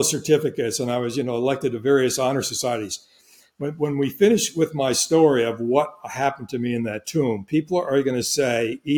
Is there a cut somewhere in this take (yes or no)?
no